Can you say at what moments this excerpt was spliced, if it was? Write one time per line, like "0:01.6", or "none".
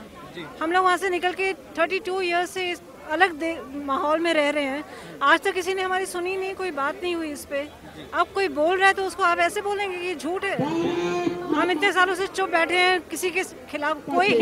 none

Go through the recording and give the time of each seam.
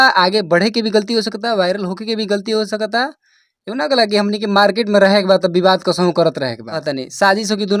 0:06.8

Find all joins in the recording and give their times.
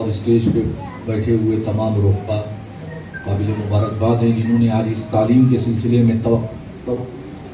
none

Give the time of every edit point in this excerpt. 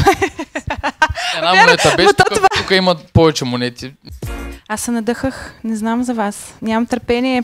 0:04.3

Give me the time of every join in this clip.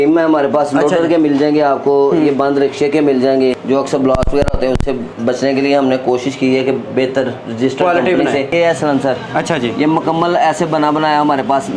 0:03.6
0:05.1
0:08.7

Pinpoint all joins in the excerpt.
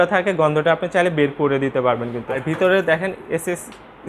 0:02.5

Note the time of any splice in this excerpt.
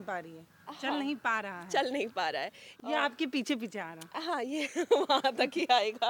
0:02.6

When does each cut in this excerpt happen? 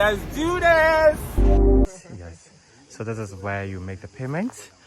0:01.8

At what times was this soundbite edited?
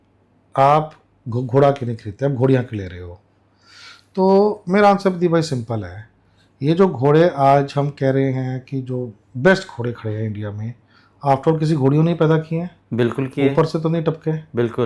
none

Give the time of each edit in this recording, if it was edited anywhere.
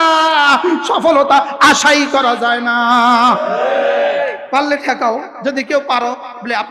0:04.4
0:05.3

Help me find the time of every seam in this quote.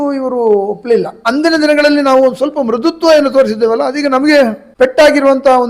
0:01.2

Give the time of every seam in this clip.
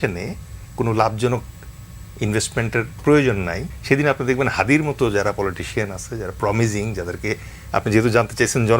0:03.7

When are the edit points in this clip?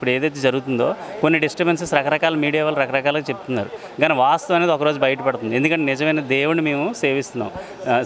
none

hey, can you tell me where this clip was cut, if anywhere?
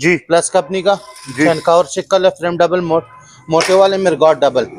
none

